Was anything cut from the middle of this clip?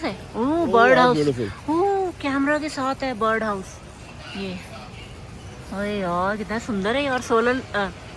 no; 0 cuts

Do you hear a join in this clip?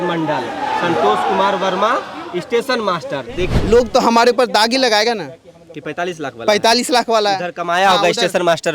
yes; 1 cut; at 3.5 s

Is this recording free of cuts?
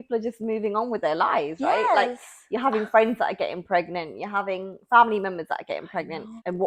yes; 0 cuts

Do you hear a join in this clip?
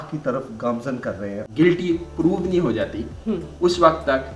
yes; 1 cut; at 1.4 s

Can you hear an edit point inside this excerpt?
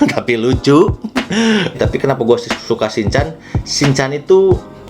yes; 1 cut; at 1.8 s

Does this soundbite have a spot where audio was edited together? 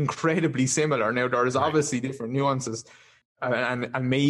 yes; 1 cut; at 3.1 s

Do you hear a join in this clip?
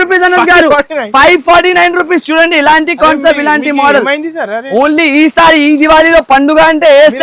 no; 0 cuts

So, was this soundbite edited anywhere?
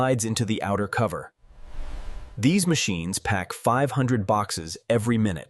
no; 0 cuts

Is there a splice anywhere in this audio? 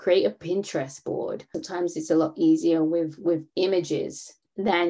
yes; 1 cut; at 1.6 s

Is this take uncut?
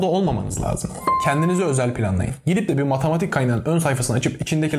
no; 1 cut; at 1.1 s

